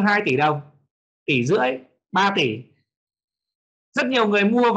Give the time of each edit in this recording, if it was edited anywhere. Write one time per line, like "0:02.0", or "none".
none